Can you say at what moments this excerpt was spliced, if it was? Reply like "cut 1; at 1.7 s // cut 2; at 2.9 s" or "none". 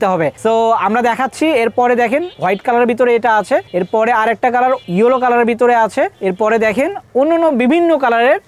none